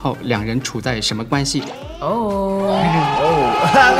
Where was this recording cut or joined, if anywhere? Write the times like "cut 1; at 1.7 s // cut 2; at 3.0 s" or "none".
cut 1; at 1.8 s